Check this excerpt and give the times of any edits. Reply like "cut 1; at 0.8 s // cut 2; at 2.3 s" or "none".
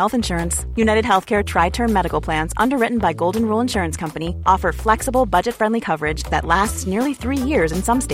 none